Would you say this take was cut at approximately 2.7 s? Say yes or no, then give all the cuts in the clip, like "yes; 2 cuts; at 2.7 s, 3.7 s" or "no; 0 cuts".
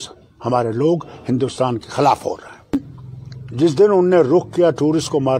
yes; 1 cut; at 2.7 s